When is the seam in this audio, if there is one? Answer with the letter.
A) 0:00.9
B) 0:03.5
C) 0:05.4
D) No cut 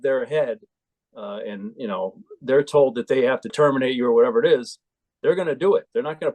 B